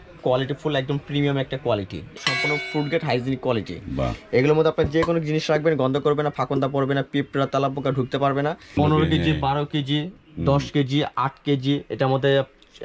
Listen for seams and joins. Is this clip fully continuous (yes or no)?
no